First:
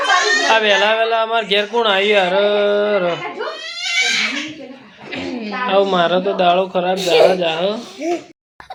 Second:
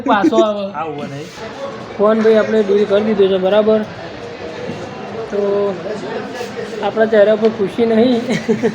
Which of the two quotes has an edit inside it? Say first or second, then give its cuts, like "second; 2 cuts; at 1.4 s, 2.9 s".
second; 1 cut; at 1.4 s